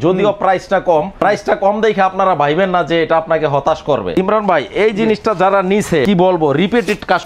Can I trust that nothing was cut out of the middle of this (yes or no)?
no